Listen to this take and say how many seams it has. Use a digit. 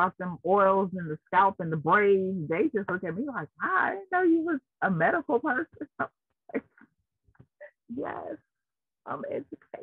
0